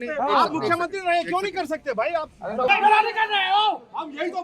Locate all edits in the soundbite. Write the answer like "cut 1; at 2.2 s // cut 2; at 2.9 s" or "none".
cut 1; at 2.7 s